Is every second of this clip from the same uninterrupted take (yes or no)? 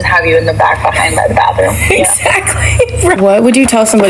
yes